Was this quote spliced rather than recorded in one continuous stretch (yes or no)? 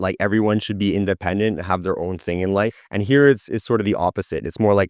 yes